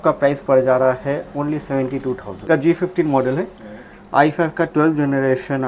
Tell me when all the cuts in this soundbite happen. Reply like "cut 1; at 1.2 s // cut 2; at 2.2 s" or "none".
cut 1; at 2.5 s